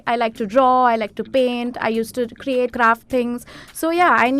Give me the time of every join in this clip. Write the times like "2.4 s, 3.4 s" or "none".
2.7 s